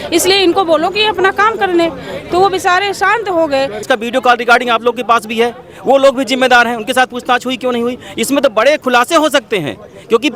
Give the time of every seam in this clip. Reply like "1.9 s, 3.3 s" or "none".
3.8 s